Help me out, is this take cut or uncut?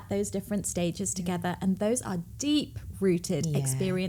uncut